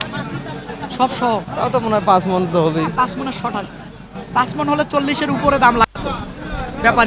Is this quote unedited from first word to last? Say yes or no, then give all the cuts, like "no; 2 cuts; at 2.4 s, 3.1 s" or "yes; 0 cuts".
yes; 0 cuts